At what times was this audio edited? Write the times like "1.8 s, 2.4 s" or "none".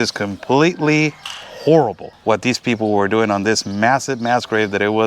2.1 s